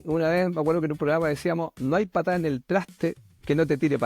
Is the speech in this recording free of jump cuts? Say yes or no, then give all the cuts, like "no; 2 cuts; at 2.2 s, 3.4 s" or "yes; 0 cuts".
no; 1 cut; at 1.7 s